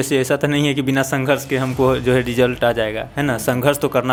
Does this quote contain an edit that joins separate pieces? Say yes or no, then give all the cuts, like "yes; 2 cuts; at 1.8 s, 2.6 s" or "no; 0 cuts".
no; 0 cuts